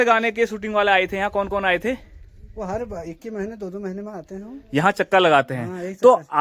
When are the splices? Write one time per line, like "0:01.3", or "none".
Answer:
none